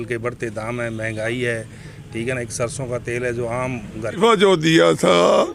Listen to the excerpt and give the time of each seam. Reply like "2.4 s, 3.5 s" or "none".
4.2 s